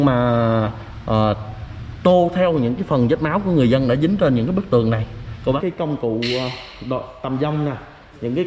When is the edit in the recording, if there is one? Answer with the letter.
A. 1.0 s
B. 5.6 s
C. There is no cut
B